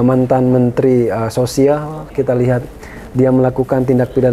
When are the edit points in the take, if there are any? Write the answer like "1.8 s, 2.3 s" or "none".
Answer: none

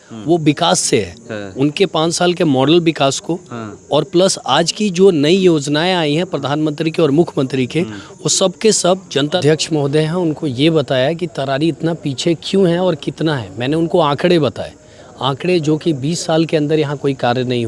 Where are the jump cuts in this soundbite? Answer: 9.4 s

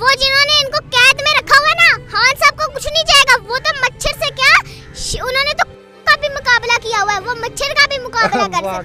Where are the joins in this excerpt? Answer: none

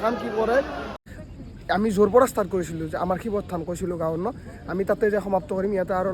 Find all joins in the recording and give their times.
0.9 s

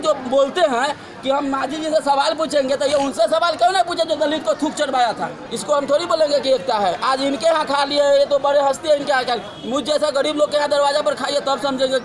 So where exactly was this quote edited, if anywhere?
5.4 s

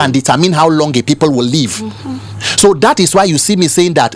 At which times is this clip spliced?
none

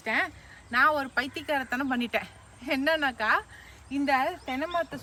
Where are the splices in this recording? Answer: none

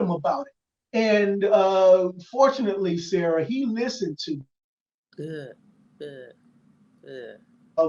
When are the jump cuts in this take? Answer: none

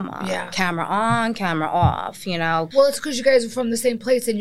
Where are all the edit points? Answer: 2.7 s

